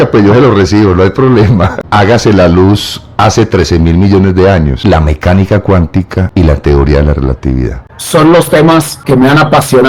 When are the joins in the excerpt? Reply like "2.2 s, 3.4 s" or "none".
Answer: 1.8 s, 4.8 s, 6.2 s, 7.9 s, 9.0 s